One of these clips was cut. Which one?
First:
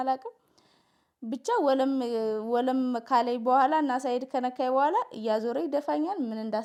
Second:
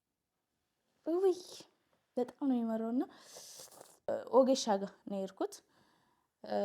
second; 1 cut; at 4.1 s

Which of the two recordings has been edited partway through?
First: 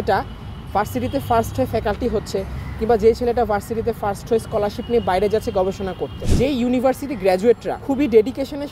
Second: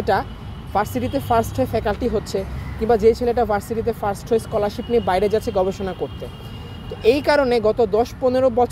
first; 2 cuts; at 6.2 s, 7.7 s

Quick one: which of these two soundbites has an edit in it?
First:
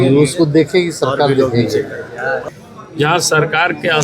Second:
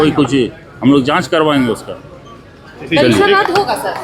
first; 1 cut; at 2.5 s

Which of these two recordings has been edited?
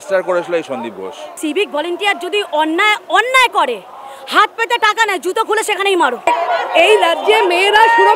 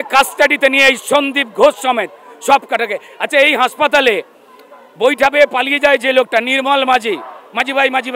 first; 2 cuts; at 1.3 s, 6.3 s

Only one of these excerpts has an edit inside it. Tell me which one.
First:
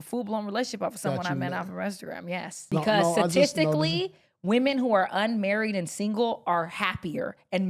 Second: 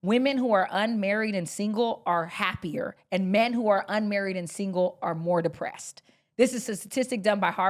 first; 1 cut; at 2.6 s

